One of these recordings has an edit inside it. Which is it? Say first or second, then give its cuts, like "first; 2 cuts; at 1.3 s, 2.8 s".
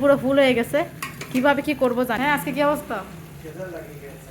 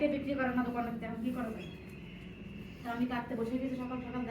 first; 1 cut; at 2.2 s